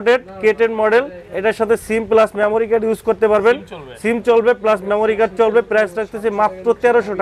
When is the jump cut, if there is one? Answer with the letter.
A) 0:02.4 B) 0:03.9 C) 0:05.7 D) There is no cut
D